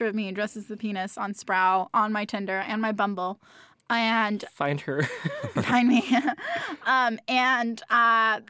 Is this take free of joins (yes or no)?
yes